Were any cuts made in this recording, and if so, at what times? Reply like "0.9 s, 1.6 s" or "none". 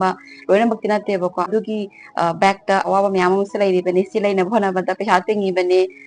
1.5 s, 2.9 s